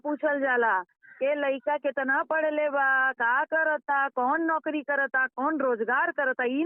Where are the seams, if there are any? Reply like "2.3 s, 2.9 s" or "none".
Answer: none